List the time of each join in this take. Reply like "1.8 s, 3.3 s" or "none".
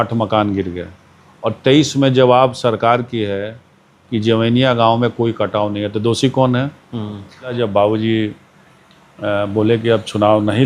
7.5 s